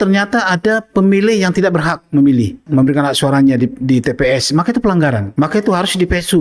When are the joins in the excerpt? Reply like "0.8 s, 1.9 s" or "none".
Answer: 2.6 s, 5.2 s